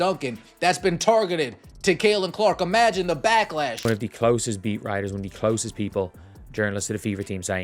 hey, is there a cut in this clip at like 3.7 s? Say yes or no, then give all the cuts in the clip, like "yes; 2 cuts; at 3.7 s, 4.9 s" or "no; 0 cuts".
yes; 1 cut; at 3.7 s